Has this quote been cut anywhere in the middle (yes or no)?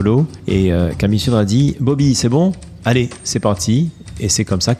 no